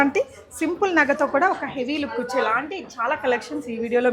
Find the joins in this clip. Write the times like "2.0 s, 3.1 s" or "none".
none

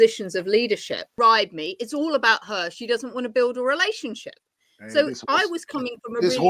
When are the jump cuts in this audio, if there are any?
1.1 s

